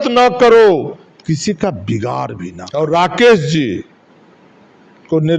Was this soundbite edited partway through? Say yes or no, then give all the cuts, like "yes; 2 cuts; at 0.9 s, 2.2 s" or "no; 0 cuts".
yes; 1 cut; at 2.4 s